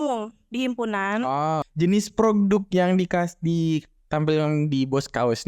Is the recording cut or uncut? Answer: cut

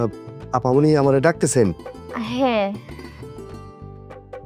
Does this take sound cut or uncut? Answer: cut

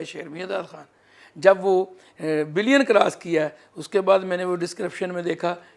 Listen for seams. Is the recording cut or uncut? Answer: uncut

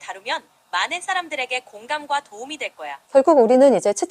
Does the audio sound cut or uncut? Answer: cut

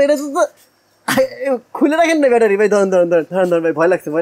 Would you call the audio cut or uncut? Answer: cut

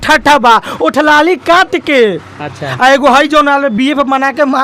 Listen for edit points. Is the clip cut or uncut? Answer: uncut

